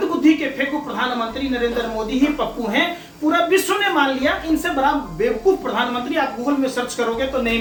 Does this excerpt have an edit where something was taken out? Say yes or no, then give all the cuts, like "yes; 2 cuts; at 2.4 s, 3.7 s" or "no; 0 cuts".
no; 0 cuts